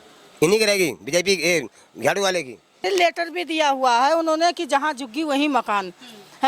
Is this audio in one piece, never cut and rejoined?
no; 1 cut; at 2.8 s

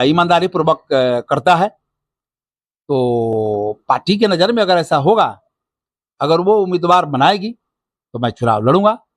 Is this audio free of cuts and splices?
yes; 0 cuts

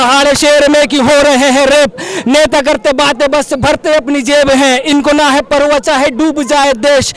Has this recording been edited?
no; 0 cuts

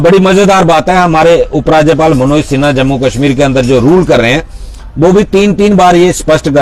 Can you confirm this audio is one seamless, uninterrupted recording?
yes; 0 cuts

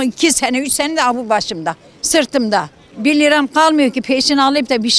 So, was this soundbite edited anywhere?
no; 0 cuts

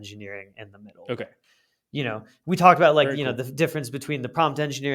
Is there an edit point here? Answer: no; 0 cuts

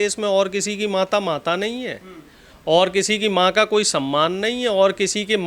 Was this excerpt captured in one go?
yes; 0 cuts

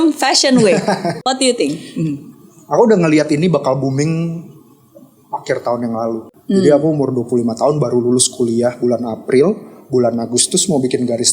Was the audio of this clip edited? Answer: yes; 2 cuts; at 1.2 s, 6.3 s

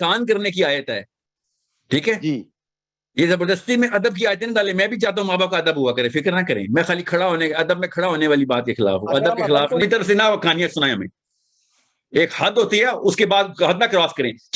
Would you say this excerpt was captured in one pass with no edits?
no; 1 cut; at 9.8 s

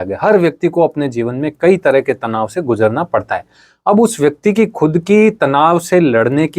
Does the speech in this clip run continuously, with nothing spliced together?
yes; 0 cuts

